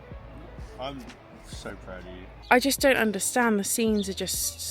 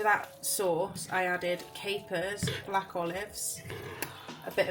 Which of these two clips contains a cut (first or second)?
first